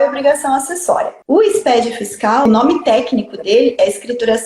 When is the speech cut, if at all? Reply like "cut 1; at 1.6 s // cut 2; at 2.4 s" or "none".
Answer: cut 1; at 1.1 s // cut 2; at 2.4 s